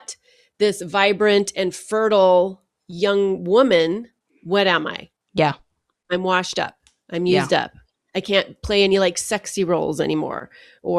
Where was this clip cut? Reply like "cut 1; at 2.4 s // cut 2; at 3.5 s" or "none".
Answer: none